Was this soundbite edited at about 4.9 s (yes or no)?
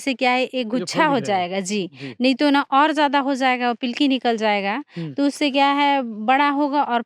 no